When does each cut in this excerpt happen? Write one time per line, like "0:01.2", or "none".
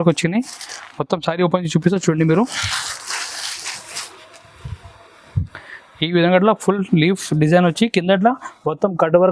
none

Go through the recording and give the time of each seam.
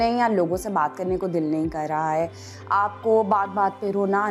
none

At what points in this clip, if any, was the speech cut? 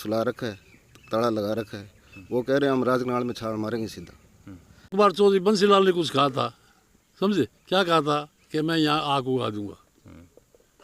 0:04.9

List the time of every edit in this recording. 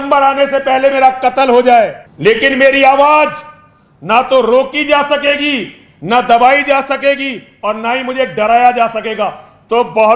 0:02.0

